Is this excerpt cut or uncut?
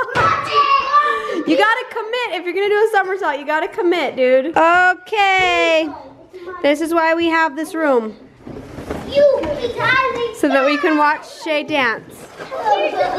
cut